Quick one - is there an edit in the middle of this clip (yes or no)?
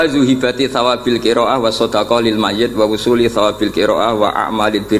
no